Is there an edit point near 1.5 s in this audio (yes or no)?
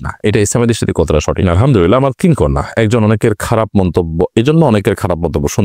yes